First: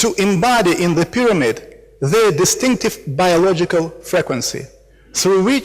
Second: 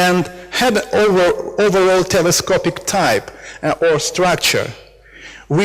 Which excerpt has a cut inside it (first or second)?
first